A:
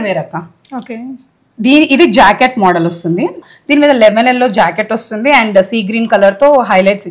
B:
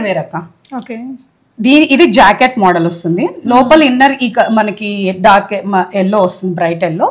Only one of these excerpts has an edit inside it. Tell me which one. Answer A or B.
A